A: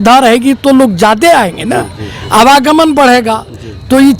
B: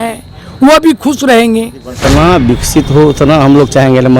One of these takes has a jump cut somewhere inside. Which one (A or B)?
B